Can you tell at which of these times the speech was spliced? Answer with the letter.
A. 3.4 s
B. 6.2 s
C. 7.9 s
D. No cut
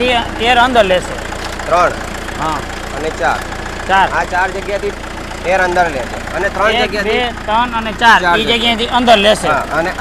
D